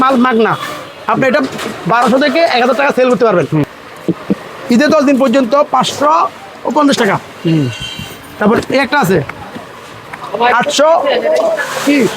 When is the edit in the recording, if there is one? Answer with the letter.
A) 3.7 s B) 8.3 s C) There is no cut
A